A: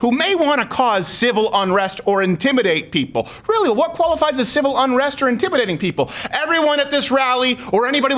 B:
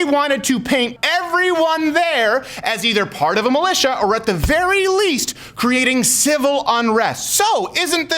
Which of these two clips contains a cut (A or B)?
B